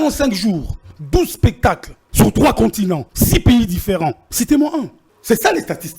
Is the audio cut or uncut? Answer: cut